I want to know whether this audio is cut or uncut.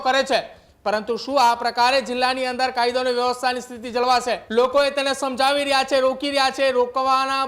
cut